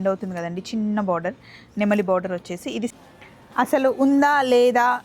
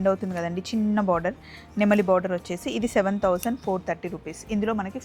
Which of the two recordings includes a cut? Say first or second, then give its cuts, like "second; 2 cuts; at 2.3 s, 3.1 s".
first; 1 cut; at 2.9 s